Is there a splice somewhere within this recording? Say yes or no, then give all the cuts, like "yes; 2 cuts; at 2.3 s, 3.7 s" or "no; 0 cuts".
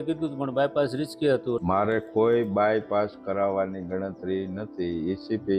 yes; 1 cut; at 1.6 s